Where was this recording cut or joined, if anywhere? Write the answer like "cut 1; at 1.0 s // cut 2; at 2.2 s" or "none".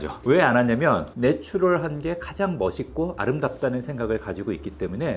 cut 1; at 1.1 s